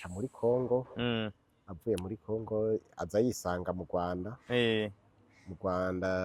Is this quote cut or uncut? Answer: uncut